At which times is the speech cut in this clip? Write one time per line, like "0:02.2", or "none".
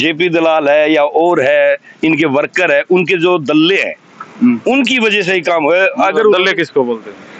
none